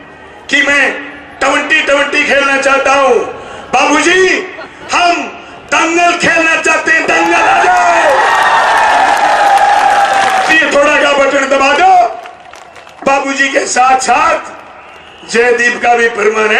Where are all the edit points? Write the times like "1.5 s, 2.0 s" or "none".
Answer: 10.5 s